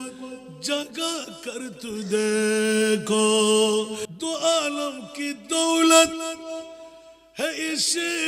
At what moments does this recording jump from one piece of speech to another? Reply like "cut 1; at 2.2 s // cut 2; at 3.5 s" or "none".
cut 1; at 4.0 s